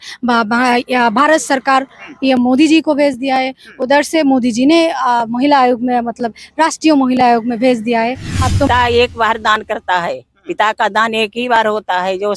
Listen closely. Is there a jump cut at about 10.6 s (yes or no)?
no